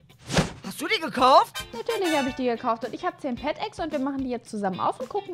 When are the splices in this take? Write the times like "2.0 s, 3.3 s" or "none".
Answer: none